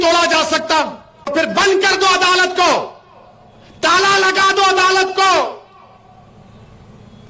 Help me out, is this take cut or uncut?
cut